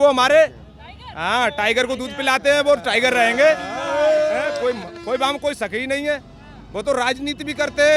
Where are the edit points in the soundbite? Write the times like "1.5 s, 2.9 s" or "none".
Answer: none